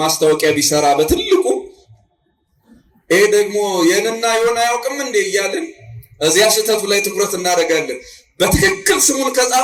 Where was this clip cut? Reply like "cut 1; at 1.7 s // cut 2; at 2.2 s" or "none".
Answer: none

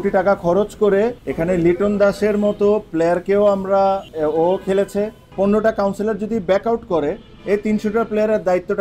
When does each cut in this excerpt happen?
cut 1; at 1.2 s // cut 2; at 4.1 s // cut 3; at 5.2 s

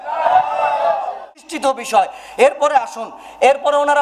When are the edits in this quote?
cut 1; at 1.4 s

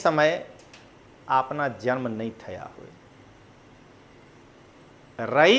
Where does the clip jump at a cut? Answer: none

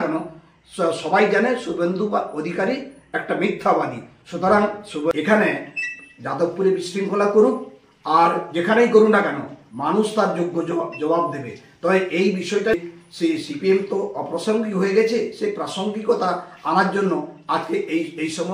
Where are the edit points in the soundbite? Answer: cut 1; at 5.1 s // cut 2; at 12.7 s

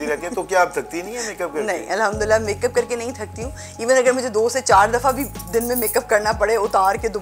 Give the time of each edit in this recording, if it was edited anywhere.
none

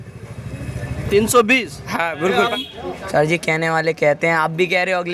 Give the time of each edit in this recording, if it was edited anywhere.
cut 1; at 2.5 s

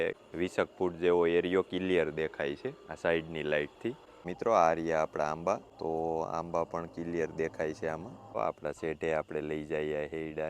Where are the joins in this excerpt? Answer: cut 1; at 4.3 s // cut 2; at 8.4 s

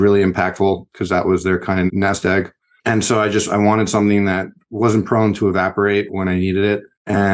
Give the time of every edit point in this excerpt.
cut 1; at 2.8 s

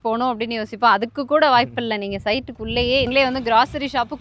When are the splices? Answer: cut 1; at 3.1 s

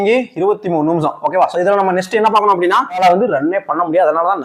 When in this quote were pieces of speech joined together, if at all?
cut 1; at 3.0 s

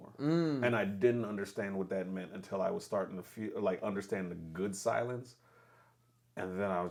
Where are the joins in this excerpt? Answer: none

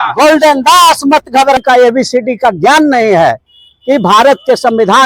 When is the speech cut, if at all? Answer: cut 1; at 1.6 s

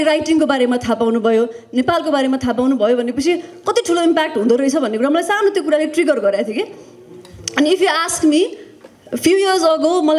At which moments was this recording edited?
none

